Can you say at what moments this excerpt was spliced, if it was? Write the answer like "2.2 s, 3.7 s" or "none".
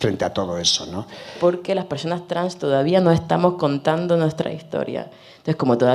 1.4 s